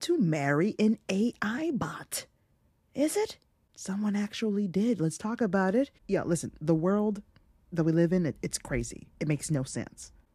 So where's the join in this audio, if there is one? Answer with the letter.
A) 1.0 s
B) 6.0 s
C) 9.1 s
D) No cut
D